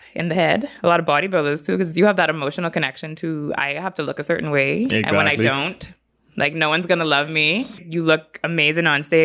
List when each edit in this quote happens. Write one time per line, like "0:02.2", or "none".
0:07.8